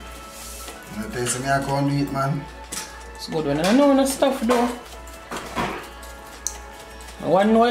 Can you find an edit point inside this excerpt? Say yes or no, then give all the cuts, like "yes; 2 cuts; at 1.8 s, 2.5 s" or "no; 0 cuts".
no; 0 cuts